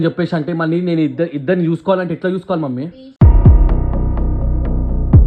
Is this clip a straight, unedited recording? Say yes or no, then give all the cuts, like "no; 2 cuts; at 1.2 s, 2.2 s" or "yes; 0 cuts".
yes; 0 cuts